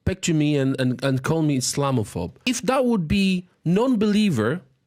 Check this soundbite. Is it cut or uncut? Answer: cut